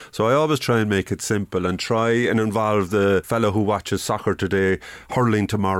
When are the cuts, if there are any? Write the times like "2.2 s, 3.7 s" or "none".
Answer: 3.3 s